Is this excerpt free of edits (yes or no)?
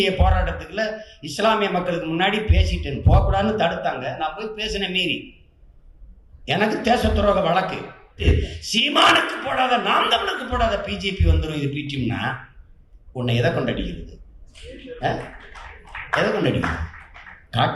no